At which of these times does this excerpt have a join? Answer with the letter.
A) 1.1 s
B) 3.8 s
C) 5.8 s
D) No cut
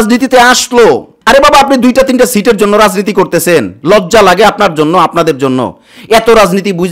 A